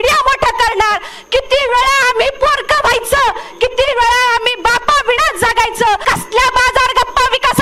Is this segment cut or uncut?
cut